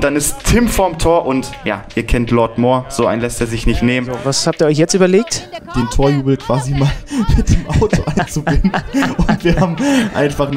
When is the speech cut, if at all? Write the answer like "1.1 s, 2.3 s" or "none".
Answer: 4.2 s, 5.6 s